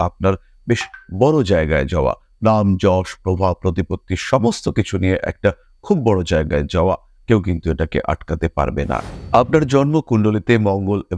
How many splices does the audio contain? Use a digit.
1